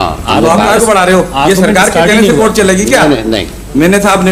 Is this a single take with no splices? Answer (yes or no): yes